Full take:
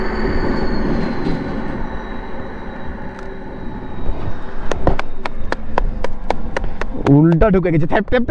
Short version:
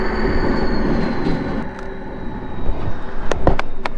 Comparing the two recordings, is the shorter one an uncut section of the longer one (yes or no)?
no